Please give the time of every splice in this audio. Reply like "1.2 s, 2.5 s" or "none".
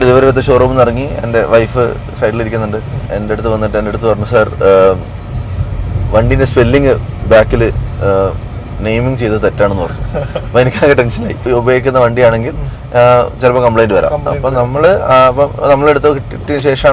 3.0 s, 11.4 s

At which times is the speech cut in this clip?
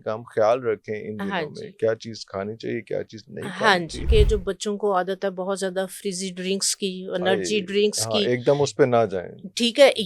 4.1 s

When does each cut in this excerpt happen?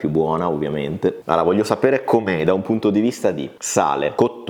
none

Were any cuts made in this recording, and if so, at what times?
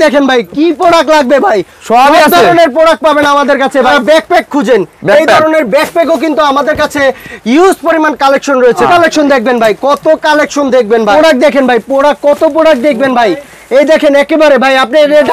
3.9 s, 8.8 s, 11.1 s

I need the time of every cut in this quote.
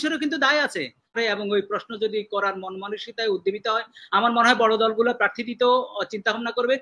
1.2 s

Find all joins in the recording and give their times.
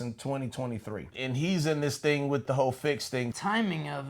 1.1 s, 2.4 s, 3.4 s

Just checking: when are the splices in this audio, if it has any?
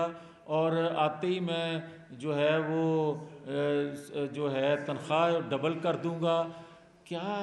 none

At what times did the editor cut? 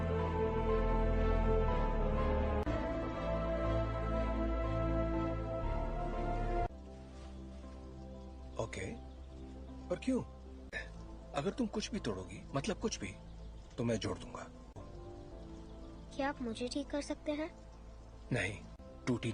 none

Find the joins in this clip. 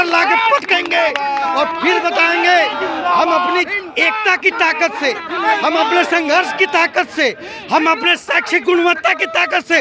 none

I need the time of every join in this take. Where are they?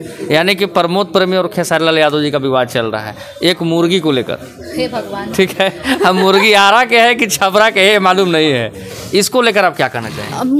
none

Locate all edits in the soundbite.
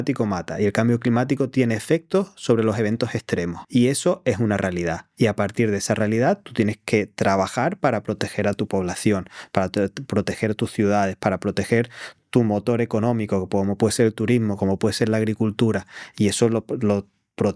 none

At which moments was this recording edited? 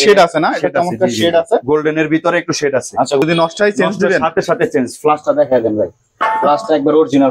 3.2 s

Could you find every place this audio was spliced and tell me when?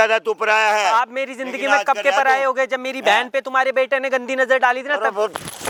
none

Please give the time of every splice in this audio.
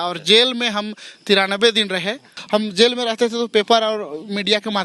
2.3 s

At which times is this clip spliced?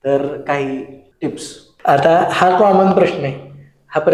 none

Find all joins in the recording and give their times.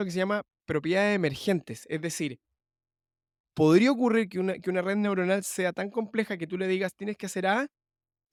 none

